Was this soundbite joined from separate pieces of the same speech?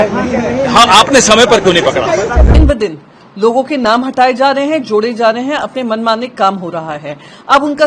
yes; 1 cut; at 2.6 s

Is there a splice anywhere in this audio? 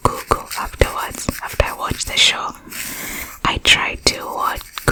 no; 0 cuts

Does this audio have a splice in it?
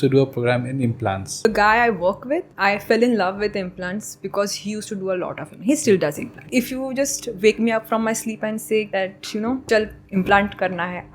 yes; 4 cuts; at 1.5 s, 2.5 s, 6.4 s, 9.3 s

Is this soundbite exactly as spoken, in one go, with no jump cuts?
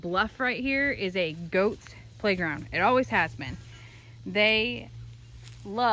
yes; 0 cuts

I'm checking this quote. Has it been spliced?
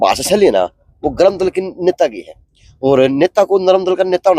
no; 0 cuts

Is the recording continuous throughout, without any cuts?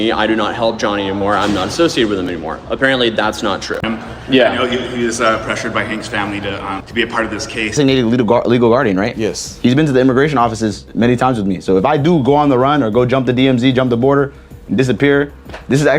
no; 2 cuts; at 3.8 s, 7.8 s

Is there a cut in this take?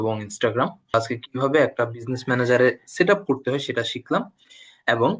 yes; 1 cut; at 0.9 s

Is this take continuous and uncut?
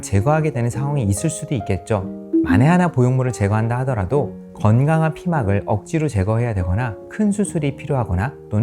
no; 1 cut; at 2.2 s

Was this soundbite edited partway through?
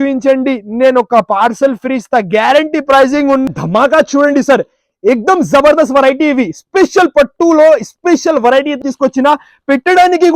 yes; 2 cuts; at 3.4 s, 8.9 s

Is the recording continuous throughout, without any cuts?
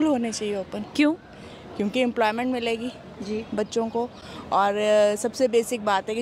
yes; 0 cuts

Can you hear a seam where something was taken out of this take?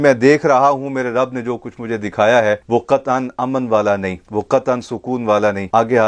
no; 0 cuts

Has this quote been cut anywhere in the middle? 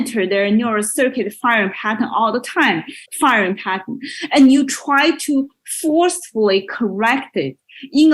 yes; 1 cut; at 3.0 s

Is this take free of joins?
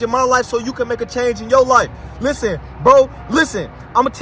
yes; 0 cuts

